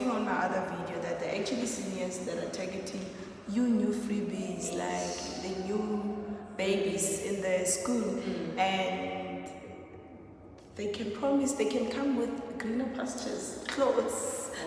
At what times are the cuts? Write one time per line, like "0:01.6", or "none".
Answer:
none